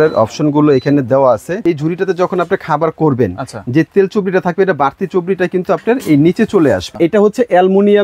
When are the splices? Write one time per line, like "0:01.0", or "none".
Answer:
0:01.6
0:06.9